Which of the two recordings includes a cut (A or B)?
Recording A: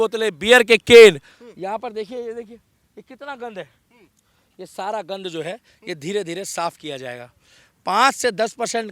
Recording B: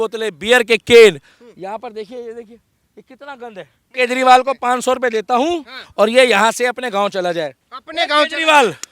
B